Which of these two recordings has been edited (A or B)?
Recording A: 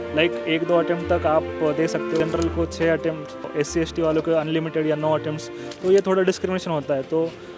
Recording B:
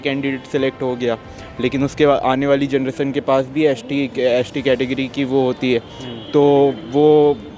A